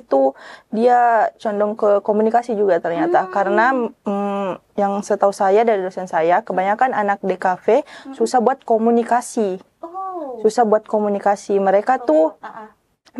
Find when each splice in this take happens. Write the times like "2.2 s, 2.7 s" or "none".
none